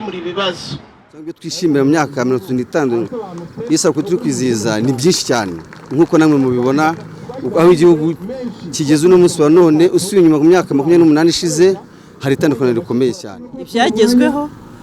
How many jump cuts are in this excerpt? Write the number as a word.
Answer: two